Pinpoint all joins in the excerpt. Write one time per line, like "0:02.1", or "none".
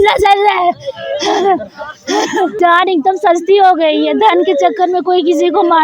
0:02.6